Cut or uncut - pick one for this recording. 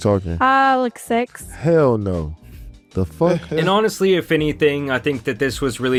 uncut